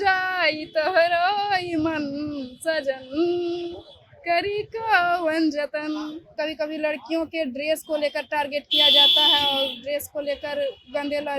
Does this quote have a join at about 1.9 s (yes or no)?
no